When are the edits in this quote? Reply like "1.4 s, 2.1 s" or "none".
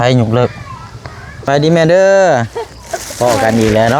1.5 s